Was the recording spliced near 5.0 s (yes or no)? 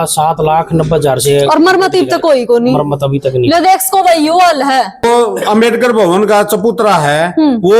yes